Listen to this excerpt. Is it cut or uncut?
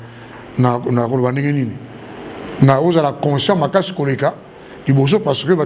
uncut